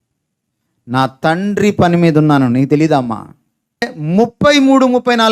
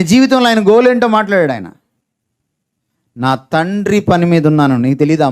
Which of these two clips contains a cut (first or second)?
first